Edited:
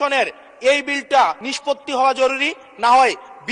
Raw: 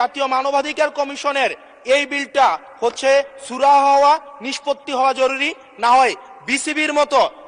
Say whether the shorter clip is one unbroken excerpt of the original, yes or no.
no